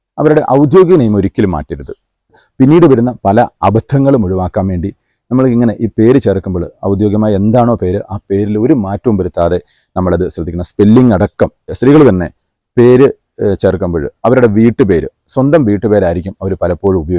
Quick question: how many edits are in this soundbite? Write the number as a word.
two